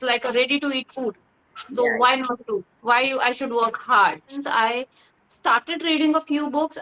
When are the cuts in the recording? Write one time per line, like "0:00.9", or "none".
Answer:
0:04.5